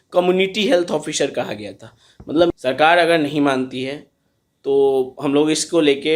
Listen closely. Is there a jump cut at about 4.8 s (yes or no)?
no